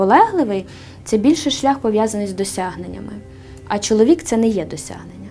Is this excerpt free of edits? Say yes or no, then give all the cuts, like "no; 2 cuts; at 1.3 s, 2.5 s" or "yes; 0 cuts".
yes; 0 cuts